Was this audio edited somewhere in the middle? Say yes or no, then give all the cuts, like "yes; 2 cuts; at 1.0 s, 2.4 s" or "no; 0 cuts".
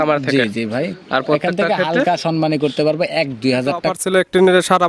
yes; 1 cut; at 4.0 s